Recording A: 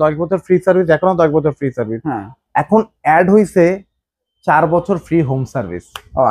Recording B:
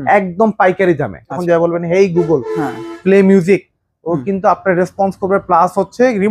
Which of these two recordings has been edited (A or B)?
B